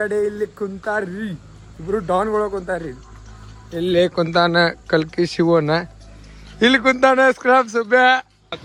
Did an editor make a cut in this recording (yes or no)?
no